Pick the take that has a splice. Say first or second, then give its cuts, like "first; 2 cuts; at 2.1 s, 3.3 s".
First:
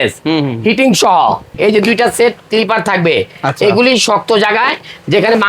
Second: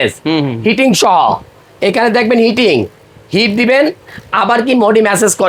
first; 1 cut; at 1.5 s